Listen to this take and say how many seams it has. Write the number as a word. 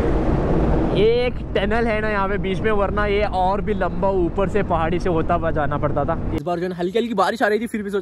one